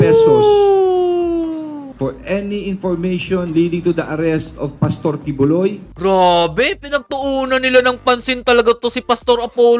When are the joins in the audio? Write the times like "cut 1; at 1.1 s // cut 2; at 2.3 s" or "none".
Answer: none